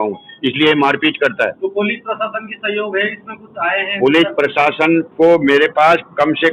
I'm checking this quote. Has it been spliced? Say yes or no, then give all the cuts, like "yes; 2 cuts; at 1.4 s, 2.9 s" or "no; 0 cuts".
no; 0 cuts